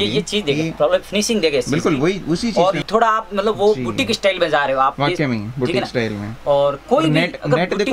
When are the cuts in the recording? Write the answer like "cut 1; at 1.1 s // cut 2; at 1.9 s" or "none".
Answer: cut 1; at 2.8 s

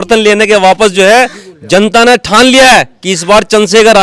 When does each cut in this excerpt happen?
none

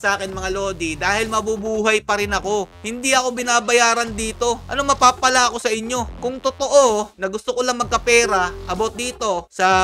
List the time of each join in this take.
none

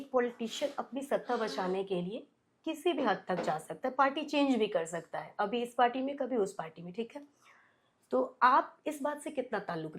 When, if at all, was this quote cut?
none

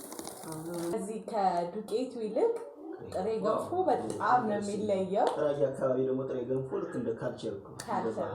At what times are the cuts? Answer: cut 1; at 0.9 s

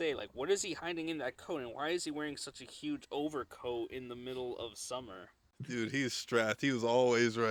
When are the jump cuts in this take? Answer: none

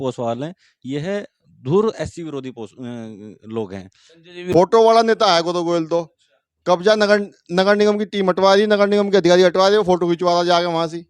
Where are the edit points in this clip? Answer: cut 1; at 4.4 s

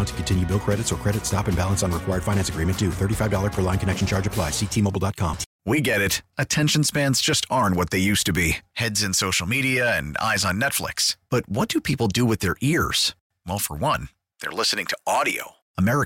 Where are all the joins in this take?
cut 1; at 5.5 s

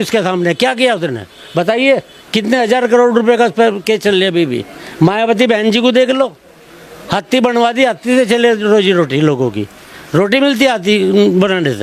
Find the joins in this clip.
none

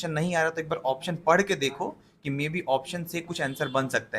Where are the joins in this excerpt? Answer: none

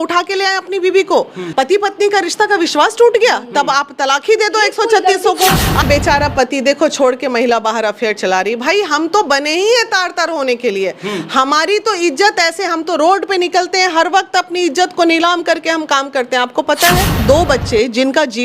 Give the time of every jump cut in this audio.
cut 1; at 1.4 s // cut 2; at 5.8 s // cut 3; at 17.2 s

